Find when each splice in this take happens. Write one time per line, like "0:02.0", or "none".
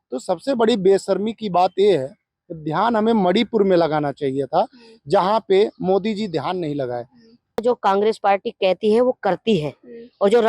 0:07.6